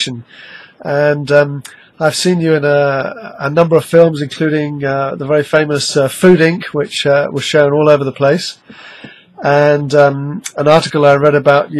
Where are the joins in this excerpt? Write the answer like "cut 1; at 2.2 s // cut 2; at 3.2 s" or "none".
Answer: none